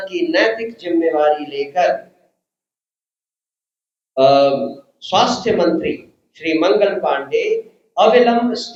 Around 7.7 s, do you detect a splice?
no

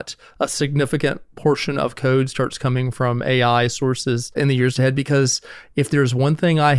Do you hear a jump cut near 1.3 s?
yes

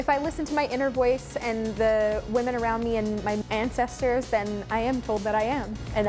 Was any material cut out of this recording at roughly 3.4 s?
yes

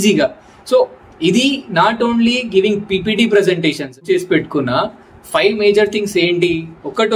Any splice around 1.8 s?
no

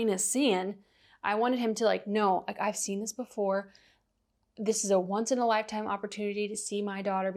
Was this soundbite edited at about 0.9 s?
no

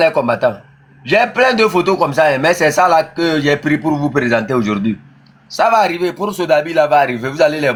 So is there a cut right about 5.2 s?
no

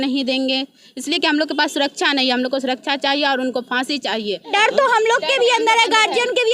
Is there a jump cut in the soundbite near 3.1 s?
no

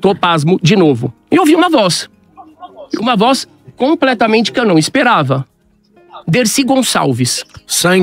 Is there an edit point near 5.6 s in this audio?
no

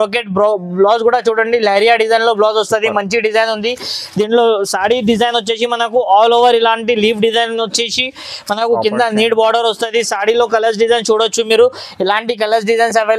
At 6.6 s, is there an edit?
no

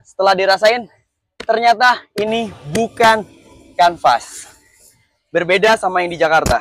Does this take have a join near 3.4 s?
no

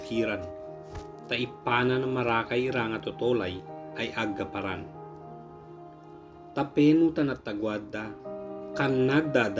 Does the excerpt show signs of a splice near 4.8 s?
yes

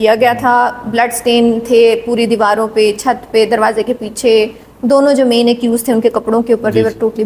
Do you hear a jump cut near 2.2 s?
no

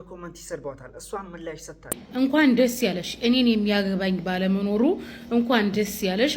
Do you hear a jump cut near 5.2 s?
no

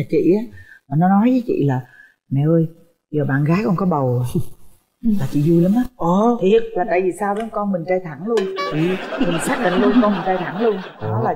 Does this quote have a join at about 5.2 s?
no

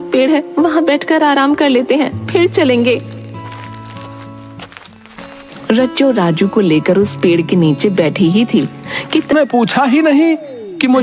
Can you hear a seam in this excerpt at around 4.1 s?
no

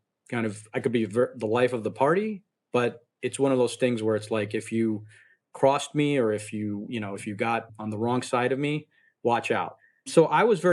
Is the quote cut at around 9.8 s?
yes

